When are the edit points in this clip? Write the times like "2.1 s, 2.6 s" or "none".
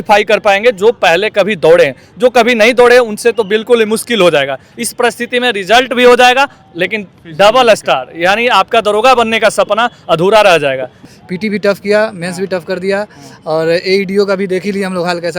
11.0 s